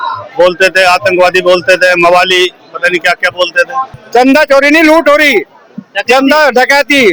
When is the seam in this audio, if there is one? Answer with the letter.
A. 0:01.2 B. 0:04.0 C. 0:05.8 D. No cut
B